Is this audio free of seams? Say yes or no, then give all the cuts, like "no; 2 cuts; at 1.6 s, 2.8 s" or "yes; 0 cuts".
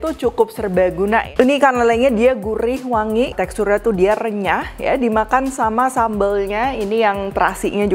no; 2 cuts; at 1.3 s, 3.3 s